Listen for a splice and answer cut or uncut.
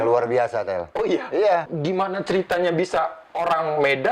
cut